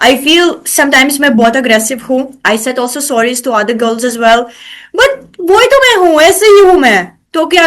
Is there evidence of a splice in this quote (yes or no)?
no